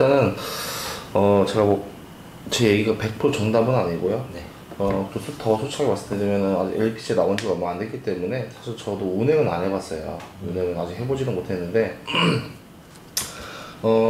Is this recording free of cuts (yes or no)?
yes